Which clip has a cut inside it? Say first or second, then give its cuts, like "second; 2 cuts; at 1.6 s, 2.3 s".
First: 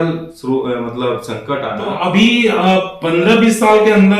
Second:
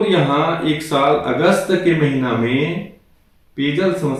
first; 1 cut; at 1.9 s